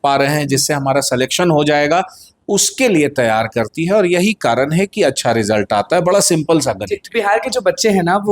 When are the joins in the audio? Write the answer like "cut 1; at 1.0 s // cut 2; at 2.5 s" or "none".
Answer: none